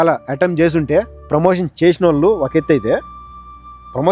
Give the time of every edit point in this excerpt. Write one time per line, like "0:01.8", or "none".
0:01.2